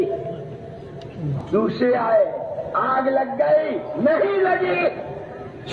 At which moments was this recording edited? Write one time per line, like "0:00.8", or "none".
0:01.4

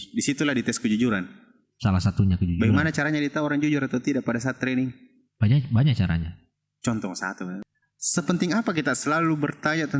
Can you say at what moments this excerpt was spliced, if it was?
0:07.6

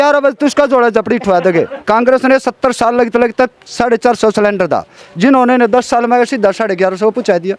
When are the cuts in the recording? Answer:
0:01.8

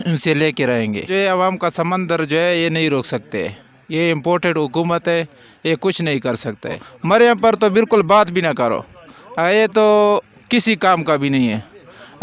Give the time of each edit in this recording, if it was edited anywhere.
0:01.1
0:07.0

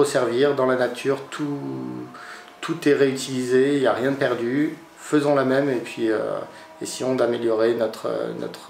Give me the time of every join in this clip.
none

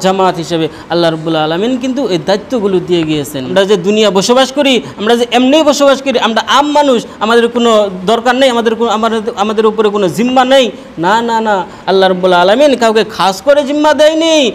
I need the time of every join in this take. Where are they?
0:03.4

